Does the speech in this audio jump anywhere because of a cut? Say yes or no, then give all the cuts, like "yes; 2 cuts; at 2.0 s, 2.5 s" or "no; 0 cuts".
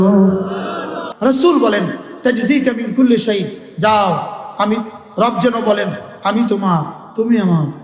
yes; 1 cut; at 1.0 s